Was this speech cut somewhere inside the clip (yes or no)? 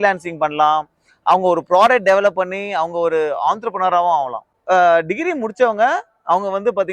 yes